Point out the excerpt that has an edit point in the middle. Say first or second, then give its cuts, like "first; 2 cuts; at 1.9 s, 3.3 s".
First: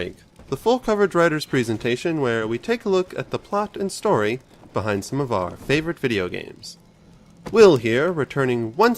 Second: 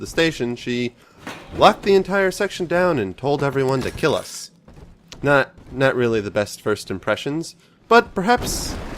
second; 1 cut; at 5.0 s